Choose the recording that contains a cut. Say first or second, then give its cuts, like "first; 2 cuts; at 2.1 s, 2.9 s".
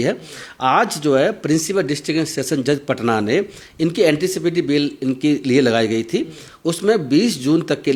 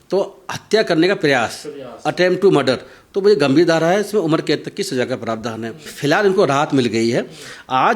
second; 1 cut; at 5.9 s